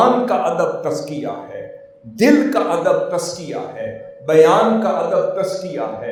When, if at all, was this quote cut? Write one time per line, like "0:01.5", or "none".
none